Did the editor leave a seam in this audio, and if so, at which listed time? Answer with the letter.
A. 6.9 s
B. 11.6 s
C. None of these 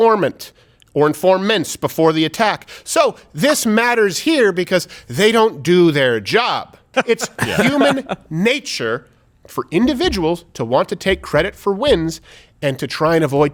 A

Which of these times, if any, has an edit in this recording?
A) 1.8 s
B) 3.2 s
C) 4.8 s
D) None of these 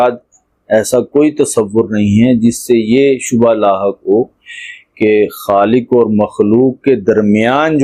D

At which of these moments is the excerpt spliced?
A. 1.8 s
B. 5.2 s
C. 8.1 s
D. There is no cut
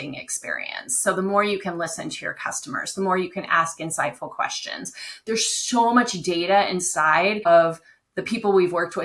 B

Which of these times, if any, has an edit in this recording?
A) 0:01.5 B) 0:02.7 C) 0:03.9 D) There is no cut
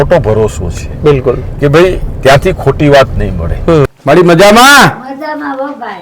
C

